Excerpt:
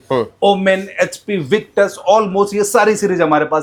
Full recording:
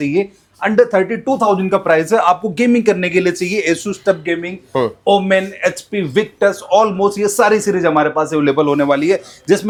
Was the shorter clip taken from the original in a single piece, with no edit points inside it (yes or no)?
yes